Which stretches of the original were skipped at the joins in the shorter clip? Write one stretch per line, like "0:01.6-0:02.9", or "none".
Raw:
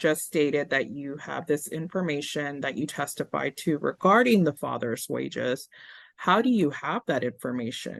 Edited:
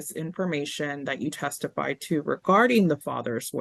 none